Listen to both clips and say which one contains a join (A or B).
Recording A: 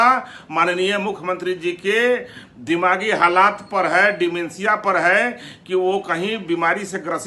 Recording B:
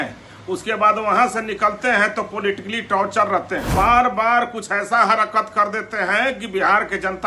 B